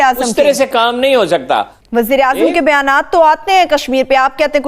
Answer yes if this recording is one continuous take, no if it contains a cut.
no